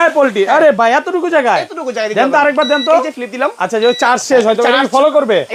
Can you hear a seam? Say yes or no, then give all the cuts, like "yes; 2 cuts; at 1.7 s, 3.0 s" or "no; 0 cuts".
no; 0 cuts